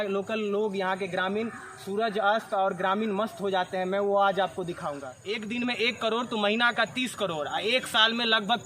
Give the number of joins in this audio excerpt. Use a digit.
1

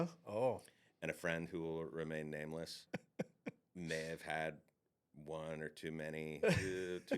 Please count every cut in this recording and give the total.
1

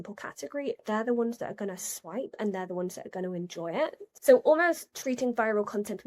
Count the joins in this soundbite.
1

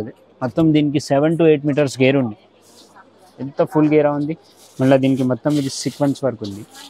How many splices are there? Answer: 0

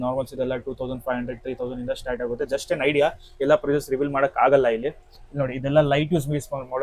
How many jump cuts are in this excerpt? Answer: 0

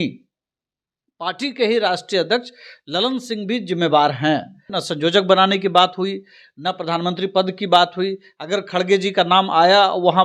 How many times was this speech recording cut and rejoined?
1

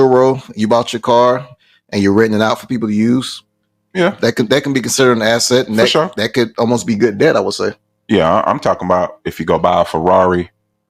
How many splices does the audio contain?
0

